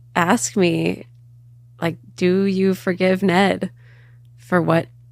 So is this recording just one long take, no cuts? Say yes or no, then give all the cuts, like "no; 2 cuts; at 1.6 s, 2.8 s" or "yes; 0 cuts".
yes; 0 cuts